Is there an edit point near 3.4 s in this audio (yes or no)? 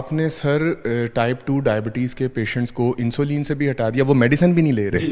no